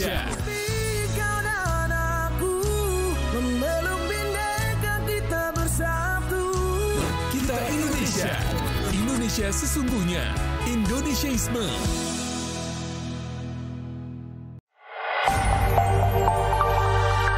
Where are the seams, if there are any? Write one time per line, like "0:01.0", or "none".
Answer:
0:14.5